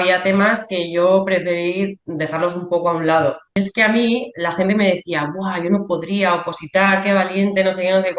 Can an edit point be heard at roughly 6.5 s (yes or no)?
no